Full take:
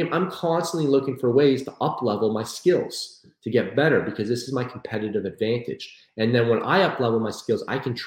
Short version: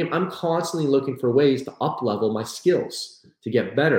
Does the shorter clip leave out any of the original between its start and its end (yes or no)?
no